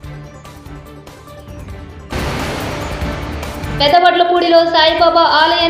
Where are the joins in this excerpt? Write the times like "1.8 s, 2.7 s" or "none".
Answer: 2.1 s, 3.8 s